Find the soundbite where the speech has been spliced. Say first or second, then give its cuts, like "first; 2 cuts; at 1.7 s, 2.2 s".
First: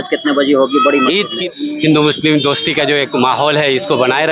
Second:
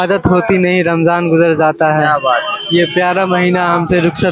first; 1 cut; at 1.6 s